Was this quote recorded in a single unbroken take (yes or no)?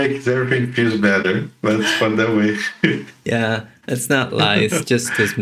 yes